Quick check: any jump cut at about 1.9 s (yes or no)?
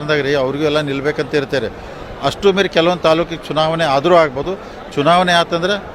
yes